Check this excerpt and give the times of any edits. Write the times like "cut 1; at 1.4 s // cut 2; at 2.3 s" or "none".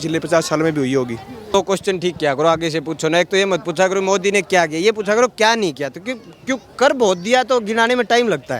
cut 1; at 1.5 s